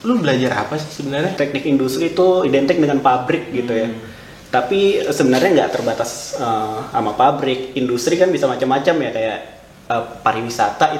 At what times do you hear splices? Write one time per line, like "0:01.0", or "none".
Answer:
0:01.3